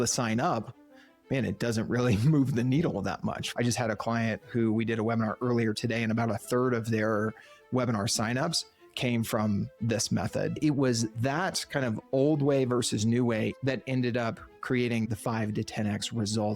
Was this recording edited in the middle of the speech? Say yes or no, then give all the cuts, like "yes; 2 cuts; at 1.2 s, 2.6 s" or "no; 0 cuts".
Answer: yes; 4 cuts; at 3.4 s, 10.6 s, 13.6 s, 15.1 s